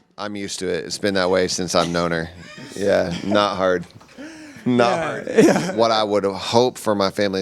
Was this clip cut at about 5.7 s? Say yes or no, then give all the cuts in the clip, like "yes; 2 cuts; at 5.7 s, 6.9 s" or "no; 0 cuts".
yes; 1 cut; at 5.7 s